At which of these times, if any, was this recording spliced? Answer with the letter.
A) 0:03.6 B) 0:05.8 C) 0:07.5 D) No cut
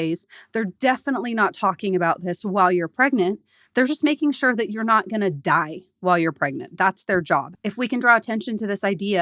C